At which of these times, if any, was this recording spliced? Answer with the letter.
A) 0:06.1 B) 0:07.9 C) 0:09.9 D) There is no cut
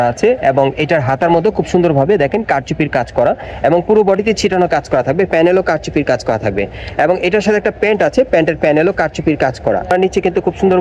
C